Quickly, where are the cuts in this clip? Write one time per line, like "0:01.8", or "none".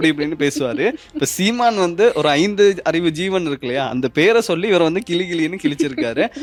none